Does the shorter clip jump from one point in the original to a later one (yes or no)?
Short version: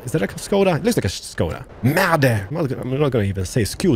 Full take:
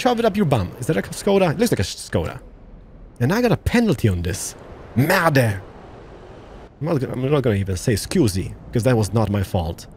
yes